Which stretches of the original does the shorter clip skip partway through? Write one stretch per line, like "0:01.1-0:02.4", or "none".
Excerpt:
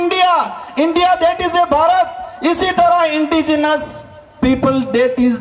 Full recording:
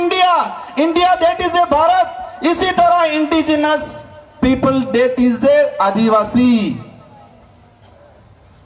none